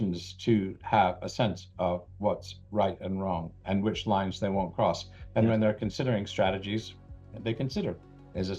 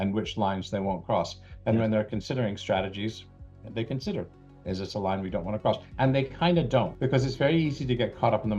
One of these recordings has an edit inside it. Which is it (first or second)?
second